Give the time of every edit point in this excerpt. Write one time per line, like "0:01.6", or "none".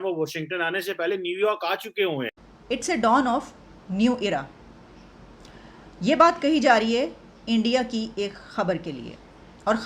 0:02.5